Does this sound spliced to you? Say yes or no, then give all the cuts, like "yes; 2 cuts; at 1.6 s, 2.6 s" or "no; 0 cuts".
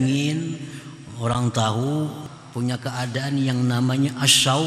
yes; 1 cut; at 2.2 s